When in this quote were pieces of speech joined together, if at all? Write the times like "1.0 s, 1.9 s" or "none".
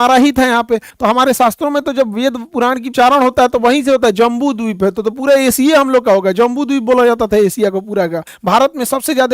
0.9 s, 2.9 s, 8.3 s